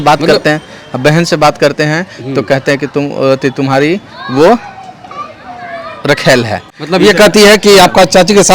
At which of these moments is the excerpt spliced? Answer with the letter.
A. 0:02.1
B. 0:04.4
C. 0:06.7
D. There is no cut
C